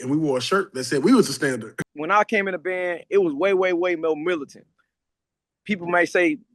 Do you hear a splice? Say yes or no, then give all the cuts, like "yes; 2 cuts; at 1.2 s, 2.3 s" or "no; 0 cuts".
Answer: yes; 1 cut; at 1.8 s